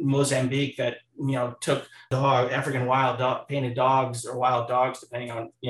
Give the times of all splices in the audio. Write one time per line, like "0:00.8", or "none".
0:02.1